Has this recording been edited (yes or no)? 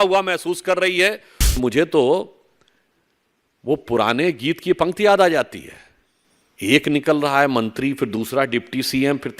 yes